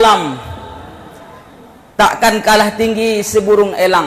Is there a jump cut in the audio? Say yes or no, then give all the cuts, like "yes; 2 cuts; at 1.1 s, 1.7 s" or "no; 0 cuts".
no; 0 cuts